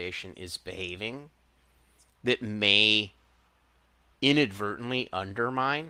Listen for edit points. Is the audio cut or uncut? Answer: uncut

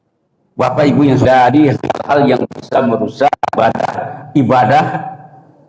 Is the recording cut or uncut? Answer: cut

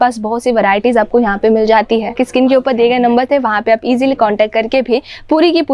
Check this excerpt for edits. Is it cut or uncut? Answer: cut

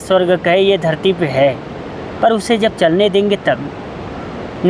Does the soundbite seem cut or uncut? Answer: uncut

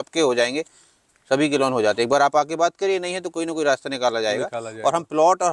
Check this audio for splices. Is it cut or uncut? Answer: uncut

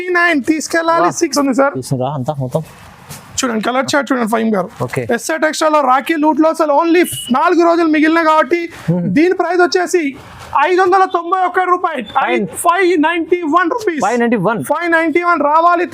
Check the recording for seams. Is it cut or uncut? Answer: cut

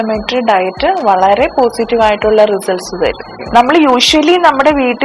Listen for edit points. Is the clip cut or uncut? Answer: cut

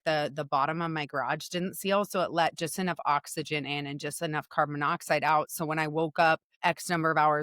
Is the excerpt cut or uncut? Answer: cut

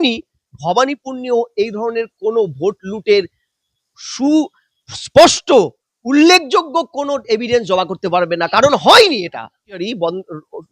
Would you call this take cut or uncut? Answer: cut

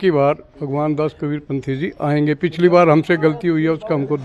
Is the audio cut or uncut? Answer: uncut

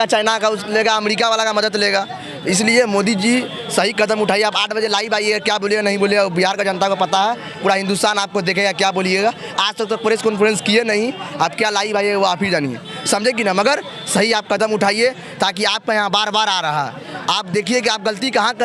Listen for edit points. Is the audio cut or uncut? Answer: uncut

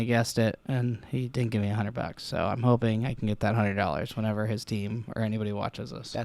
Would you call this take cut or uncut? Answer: uncut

